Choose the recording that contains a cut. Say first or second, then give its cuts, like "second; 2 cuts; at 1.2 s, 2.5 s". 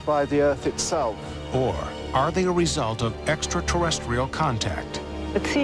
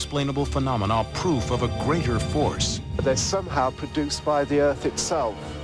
first; 1 cut; at 4.2 s